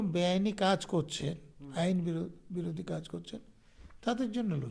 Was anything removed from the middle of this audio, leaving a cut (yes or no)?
no